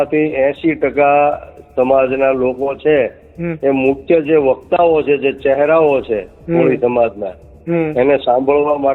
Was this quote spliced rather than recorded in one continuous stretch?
no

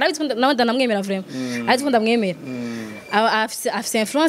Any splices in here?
no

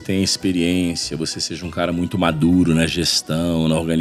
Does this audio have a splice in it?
no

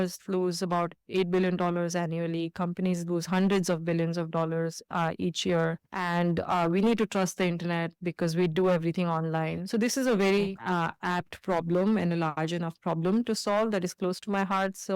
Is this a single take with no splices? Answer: yes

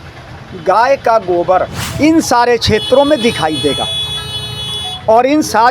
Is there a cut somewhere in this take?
yes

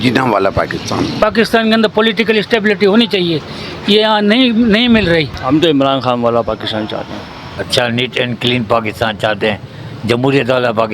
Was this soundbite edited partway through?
yes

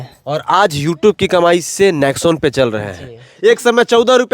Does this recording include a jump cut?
yes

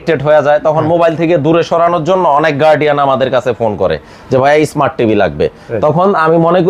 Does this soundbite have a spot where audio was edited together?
no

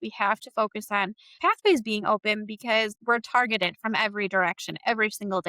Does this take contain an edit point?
yes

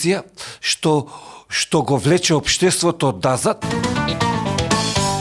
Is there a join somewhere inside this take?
yes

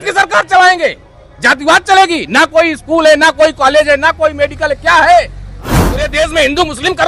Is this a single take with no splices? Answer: no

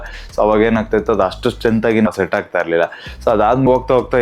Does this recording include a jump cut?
no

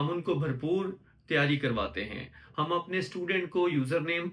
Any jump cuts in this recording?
yes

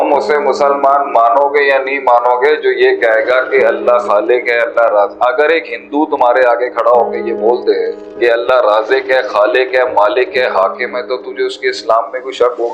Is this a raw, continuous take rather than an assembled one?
no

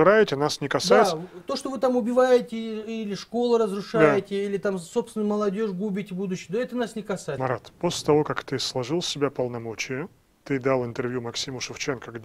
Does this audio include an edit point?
yes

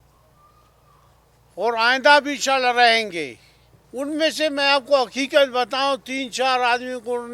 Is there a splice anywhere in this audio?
yes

